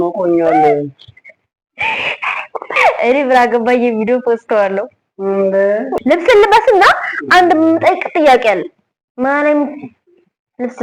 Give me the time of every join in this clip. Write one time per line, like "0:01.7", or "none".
0:02.7
0:05.9